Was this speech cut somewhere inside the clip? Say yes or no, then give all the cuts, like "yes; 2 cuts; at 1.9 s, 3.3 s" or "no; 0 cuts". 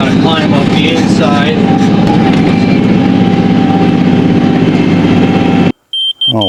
no; 0 cuts